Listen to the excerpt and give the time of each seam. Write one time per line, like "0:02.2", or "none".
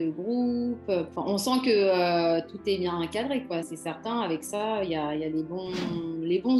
0:01.1
0:03.7